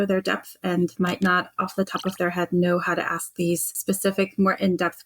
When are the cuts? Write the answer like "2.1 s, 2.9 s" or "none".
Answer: 0.9 s, 3.7 s